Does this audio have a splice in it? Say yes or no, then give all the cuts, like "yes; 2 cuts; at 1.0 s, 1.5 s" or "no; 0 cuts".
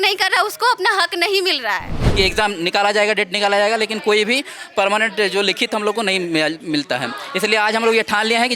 yes; 1 cut; at 2.0 s